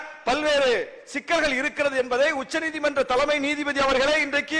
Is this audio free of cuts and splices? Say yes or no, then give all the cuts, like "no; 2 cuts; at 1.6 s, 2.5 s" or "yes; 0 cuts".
yes; 0 cuts